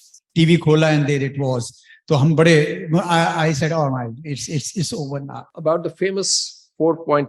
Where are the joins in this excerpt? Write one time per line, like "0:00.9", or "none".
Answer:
0:05.5